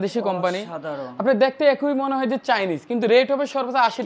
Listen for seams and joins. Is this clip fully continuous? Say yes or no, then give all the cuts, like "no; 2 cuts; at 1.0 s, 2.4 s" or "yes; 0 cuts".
yes; 0 cuts